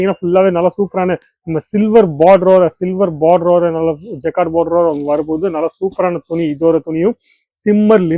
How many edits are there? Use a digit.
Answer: 0